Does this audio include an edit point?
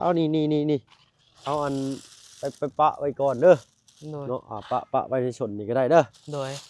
no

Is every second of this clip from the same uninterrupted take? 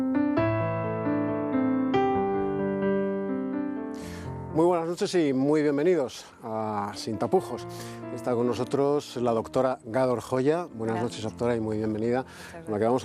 yes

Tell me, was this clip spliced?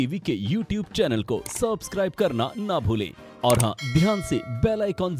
no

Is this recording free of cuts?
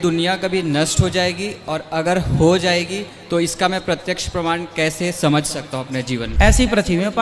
no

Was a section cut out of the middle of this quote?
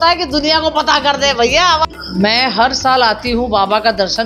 no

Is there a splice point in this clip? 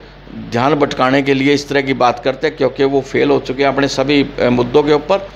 no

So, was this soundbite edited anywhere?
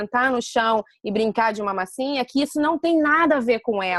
no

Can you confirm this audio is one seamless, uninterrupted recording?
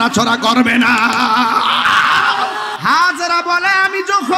no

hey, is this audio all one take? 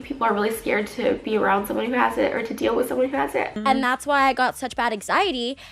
yes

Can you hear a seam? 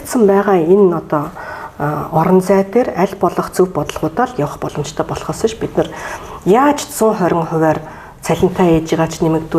no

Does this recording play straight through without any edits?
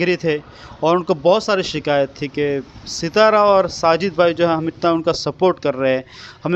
yes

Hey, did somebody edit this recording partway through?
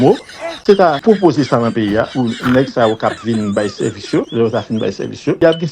yes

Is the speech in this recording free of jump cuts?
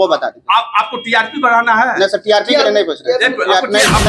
yes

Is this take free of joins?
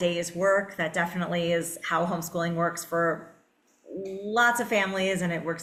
yes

